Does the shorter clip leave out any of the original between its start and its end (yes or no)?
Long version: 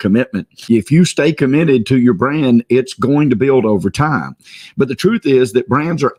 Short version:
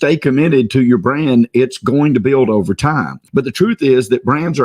yes